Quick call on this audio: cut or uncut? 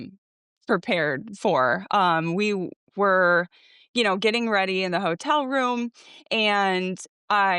uncut